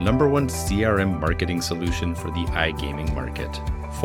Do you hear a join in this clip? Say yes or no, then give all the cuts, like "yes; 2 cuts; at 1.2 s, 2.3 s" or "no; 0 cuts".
no; 0 cuts